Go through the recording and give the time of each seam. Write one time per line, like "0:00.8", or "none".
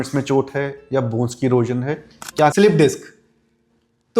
0:02.5